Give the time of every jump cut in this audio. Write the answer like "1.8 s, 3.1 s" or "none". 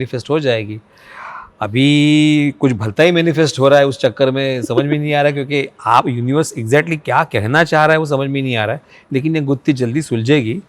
none